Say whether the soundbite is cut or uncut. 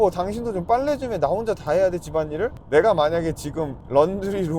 cut